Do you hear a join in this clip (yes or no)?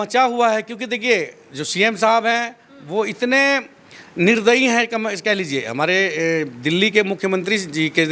no